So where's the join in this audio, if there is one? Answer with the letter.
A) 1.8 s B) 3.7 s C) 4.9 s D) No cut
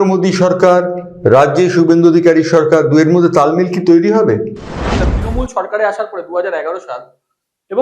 C